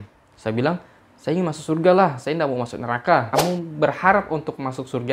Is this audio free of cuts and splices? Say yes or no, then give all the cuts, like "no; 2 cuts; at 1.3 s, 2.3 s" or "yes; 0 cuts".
no; 1 cut; at 3.3 s